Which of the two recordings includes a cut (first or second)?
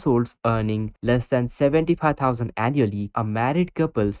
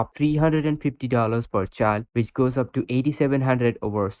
first